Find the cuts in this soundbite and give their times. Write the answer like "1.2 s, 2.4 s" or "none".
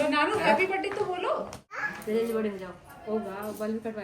1.8 s

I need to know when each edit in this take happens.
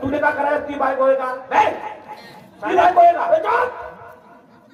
none

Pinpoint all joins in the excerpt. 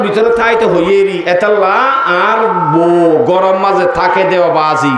none

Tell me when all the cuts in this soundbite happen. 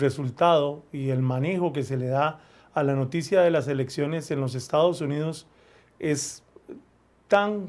4.9 s

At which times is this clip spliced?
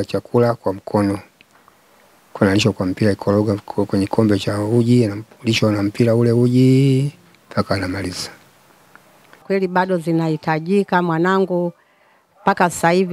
9.4 s

